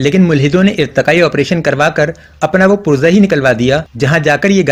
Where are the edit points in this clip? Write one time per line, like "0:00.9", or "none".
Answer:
none